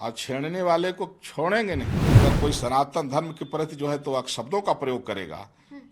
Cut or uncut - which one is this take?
cut